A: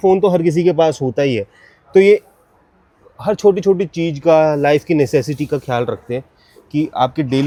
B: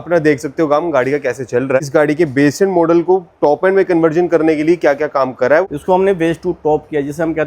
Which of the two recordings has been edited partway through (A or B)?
B